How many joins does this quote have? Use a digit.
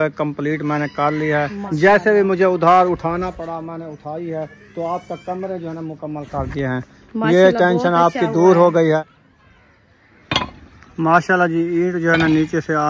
2